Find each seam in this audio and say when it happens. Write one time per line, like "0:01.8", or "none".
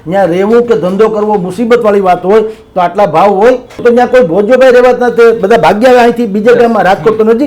0:03.7